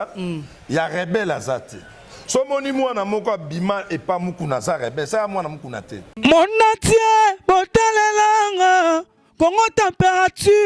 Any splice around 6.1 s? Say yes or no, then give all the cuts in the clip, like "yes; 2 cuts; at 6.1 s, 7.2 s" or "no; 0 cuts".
yes; 1 cut; at 6.1 s